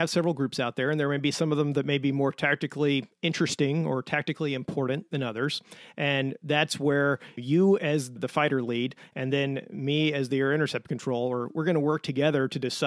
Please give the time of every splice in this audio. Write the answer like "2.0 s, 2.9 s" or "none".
7.3 s, 8.1 s